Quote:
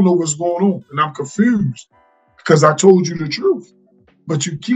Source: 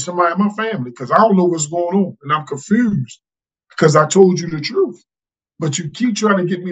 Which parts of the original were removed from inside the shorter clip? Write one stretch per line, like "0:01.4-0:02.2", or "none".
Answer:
none